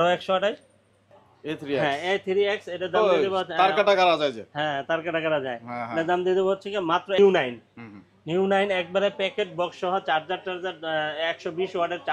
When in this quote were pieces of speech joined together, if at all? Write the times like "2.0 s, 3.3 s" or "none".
1.0 s, 7.2 s